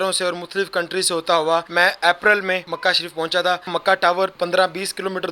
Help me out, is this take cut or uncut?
cut